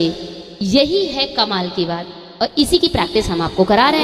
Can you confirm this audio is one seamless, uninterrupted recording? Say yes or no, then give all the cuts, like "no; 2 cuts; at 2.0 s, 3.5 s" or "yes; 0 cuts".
yes; 0 cuts